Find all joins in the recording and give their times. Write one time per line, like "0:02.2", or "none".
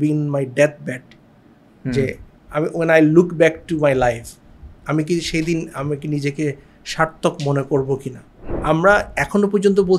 0:08.3